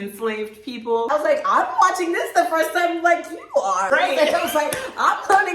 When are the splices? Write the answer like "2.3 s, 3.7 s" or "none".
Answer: 1.1 s, 3.9 s